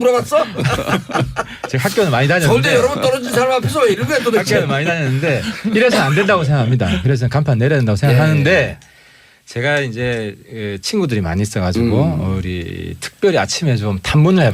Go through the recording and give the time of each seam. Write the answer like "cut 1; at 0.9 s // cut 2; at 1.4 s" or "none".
cut 1; at 5.2 s